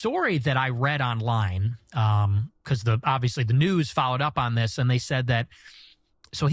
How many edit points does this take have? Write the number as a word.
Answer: one